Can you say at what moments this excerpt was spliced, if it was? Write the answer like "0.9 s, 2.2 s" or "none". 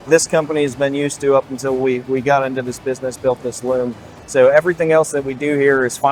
none